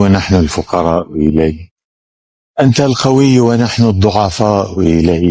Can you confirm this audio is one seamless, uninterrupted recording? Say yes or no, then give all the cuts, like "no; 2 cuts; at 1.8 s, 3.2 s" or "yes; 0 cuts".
yes; 0 cuts